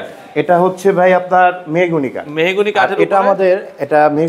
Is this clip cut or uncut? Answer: uncut